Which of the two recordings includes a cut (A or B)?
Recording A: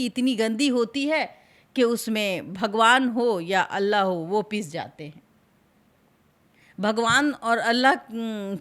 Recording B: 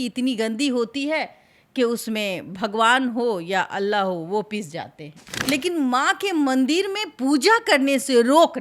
B